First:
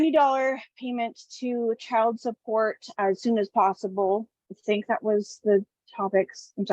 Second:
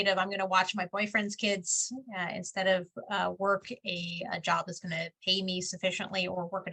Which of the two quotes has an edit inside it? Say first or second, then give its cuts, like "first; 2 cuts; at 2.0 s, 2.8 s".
first; 1 cut; at 4.4 s